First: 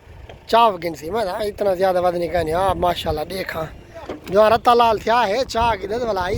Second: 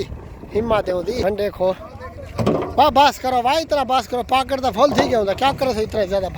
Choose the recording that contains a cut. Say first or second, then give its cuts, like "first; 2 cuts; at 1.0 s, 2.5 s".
second; 1 cut; at 1.2 s